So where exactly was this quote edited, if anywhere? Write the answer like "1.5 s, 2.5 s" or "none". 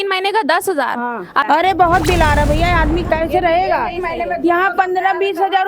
1.4 s